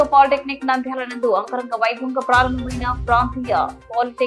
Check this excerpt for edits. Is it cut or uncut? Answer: uncut